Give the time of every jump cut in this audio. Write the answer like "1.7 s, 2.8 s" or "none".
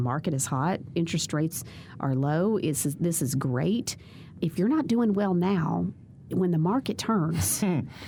none